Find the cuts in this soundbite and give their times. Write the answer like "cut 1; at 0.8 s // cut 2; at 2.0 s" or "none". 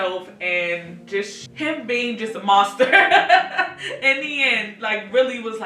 cut 1; at 1.4 s